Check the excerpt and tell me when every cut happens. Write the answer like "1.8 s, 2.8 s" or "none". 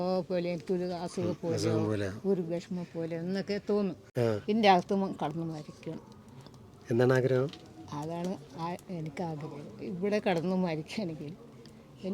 4.1 s